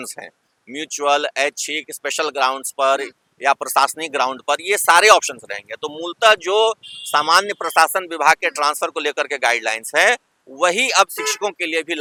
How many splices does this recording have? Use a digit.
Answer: 0